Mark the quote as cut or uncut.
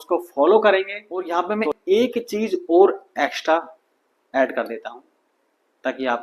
cut